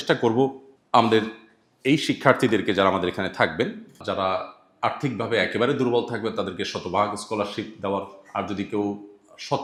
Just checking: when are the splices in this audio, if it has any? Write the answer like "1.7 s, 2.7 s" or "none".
none

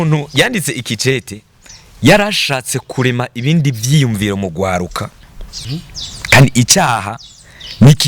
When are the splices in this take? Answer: 5.5 s

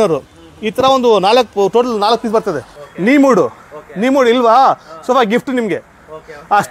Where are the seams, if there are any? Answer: 2.8 s

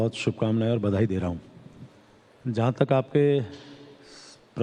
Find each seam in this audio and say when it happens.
none

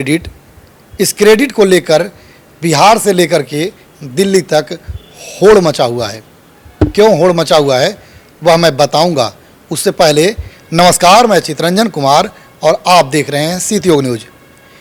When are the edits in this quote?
none

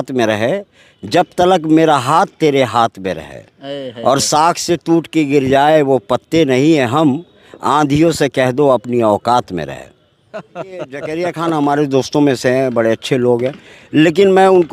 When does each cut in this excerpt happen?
11.0 s

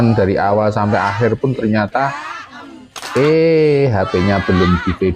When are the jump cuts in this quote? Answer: none

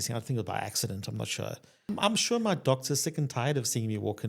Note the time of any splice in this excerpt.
1.9 s

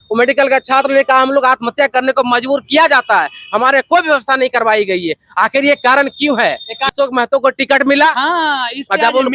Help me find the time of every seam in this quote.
6.9 s

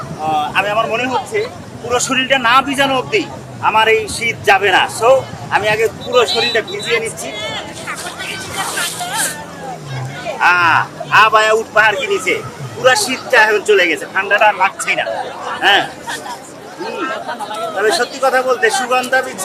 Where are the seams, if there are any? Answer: none

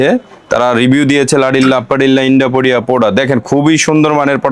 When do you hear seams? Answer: none

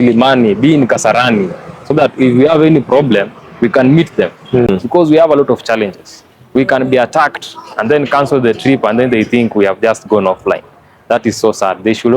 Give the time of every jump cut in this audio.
4.7 s

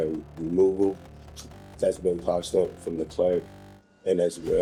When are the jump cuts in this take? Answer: none

